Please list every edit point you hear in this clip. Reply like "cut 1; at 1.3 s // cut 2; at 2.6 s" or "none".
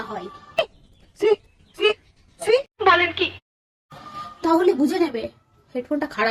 none

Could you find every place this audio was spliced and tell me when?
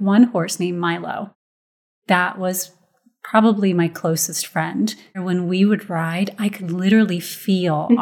cut 1; at 5.1 s

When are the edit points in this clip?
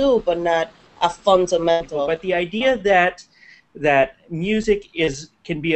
cut 1; at 2.1 s

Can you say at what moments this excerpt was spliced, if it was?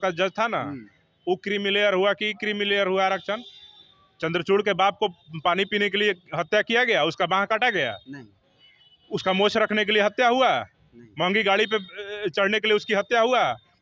none

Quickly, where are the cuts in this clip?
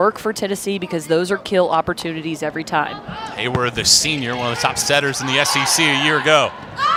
none

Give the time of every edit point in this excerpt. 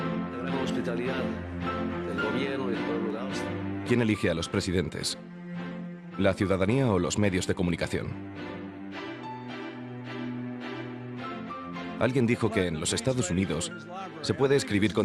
cut 1; at 1.8 s

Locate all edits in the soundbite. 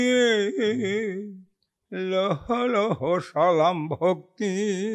none

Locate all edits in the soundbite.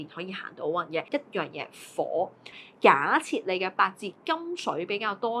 cut 1; at 1.1 s // cut 2; at 2.6 s

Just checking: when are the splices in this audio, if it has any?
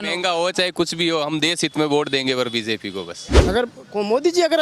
cut 1; at 3.4 s

